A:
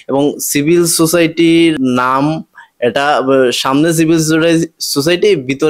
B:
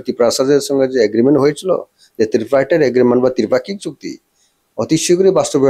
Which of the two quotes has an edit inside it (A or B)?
A